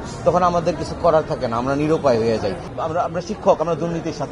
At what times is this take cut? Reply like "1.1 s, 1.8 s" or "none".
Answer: 2.7 s